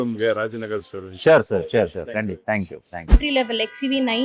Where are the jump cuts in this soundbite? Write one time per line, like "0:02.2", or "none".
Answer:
0:03.1